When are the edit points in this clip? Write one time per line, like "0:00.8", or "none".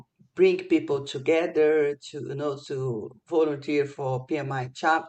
none